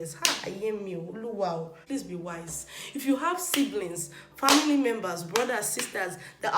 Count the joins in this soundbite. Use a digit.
1